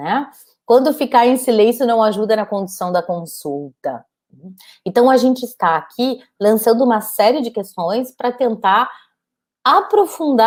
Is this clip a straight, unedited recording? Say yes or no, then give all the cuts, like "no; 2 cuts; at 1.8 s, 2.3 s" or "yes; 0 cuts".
yes; 0 cuts